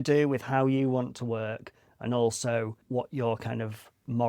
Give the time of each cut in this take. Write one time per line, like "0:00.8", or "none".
0:02.8